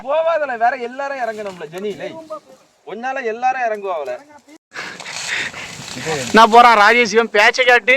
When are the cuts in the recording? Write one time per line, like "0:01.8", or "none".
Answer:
0:04.6

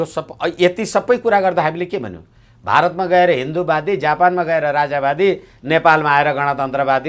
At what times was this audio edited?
none

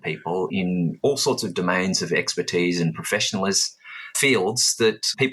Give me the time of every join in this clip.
0:04.2

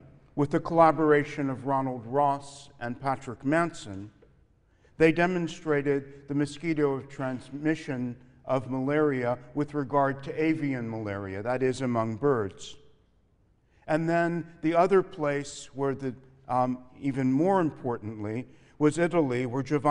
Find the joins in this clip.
none

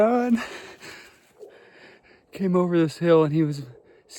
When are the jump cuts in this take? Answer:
none

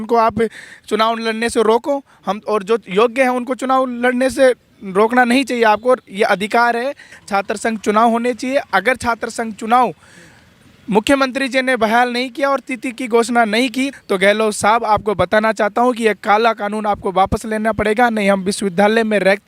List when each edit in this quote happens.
0:07.1
0:13.9

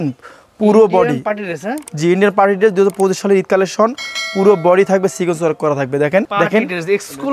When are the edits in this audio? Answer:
0:06.3

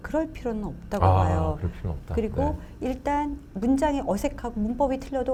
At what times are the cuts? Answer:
none

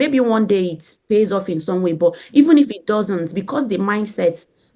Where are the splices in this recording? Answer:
none

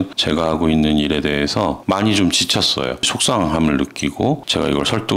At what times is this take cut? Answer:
none

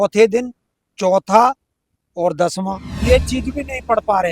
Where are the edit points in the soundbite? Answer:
0:02.9

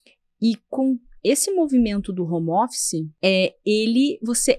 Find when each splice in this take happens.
0:03.1

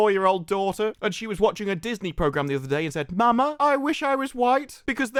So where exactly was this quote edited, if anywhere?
none

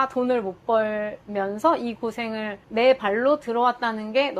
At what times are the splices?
none

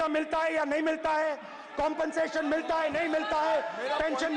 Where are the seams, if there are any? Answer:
none

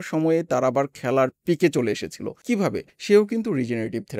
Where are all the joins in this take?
0:02.7

